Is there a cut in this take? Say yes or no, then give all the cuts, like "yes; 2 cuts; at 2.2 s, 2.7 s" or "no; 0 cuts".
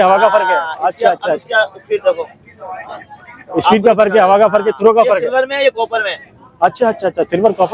no; 0 cuts